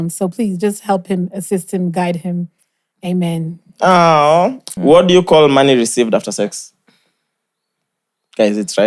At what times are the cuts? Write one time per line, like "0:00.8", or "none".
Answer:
0:04.7